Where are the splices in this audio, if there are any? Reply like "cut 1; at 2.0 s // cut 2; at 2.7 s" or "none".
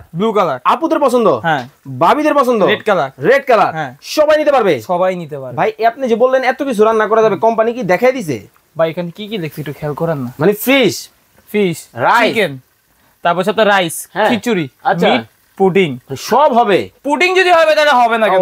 none

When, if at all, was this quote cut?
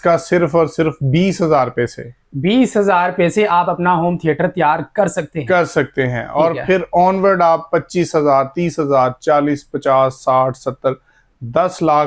none

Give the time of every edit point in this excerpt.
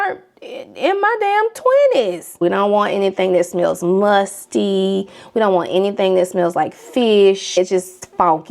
cut 1; at 2.3 s // cut 2; at 7.6 s

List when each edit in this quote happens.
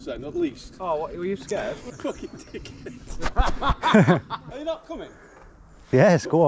cut 1; at 1.9 s // cut 2; at 4.4 s

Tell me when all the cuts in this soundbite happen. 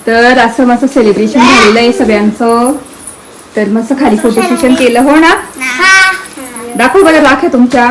none

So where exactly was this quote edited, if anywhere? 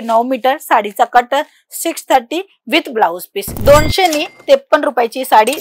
cut 1; at 3.5 s

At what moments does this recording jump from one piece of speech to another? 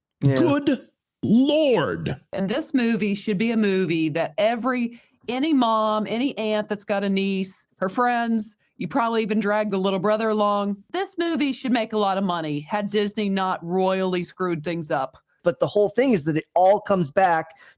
cut 1; at 2.3 s // cut 2; at 7.6 s // cut 3; at 10.8 s // cut 4; at 15.4 s

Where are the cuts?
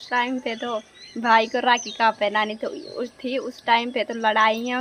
none

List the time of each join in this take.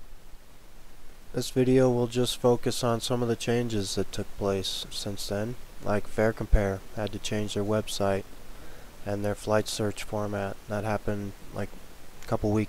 cut 1; at 3.4 s

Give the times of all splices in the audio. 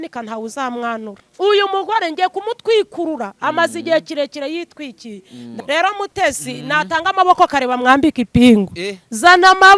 cut 1; at 1.2 s // cut 2; at 5.5 s

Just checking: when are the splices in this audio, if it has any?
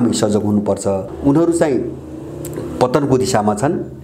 cut 1; at 1.1 s

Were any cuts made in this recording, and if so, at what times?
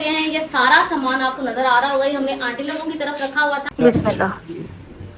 cut 1; at 3.7 s

